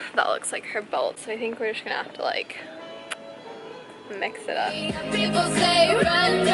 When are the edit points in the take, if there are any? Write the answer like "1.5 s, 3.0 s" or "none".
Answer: none